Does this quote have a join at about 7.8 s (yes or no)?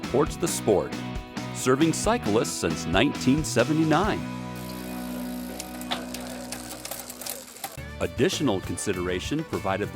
yes